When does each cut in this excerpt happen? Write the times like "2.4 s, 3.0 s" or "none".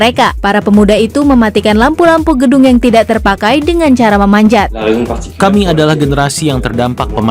4.9 s